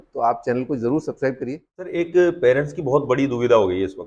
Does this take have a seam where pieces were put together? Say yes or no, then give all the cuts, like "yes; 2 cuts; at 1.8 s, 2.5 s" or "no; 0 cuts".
yes; 1 cut; at 1.8 s